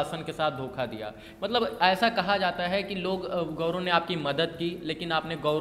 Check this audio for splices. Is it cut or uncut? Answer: uncut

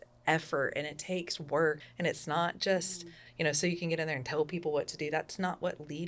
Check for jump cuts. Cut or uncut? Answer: cut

